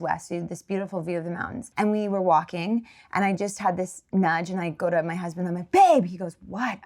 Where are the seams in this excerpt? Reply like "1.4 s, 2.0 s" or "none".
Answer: 1.6 s